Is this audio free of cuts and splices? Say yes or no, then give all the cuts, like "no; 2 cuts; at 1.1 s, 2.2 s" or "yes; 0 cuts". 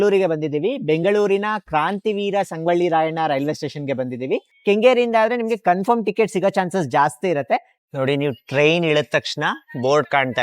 no; 2 cuts; at 4.5 s, 7.7 s